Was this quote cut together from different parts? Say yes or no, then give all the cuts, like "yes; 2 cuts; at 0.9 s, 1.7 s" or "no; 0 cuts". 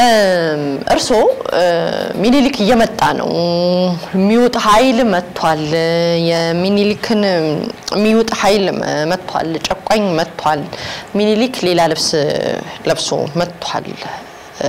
no; 0 cuts